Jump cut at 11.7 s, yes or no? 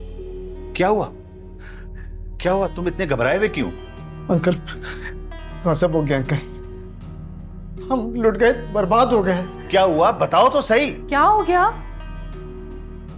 no